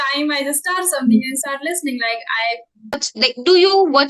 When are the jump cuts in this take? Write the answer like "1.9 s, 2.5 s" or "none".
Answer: 3.1 s

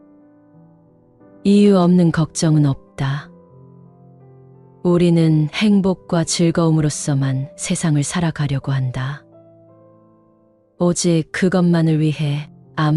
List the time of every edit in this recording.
1.1 s

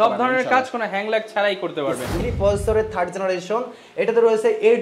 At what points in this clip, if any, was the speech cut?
2.2 s

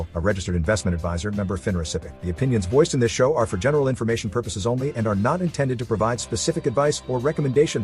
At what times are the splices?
none

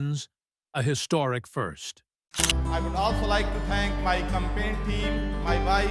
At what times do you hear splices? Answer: 2.4 s

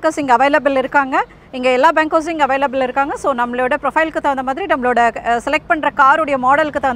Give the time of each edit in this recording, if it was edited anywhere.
none

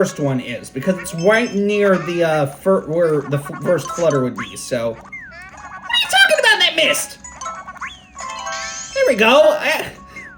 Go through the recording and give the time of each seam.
none

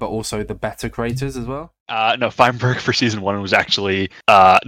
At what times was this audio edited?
1.7 s

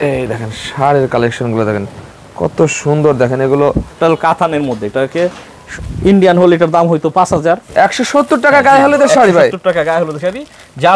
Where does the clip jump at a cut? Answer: 4.0 s, 7.7 s

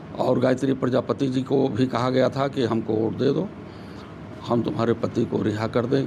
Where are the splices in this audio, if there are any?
none

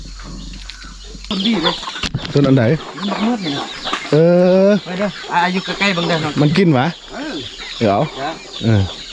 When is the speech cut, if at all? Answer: 1.3 s

